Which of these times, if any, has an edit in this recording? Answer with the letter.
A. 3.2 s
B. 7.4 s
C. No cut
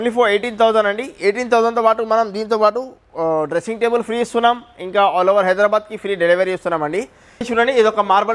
B